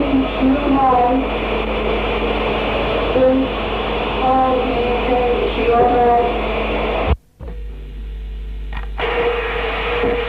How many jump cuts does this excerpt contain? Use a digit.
0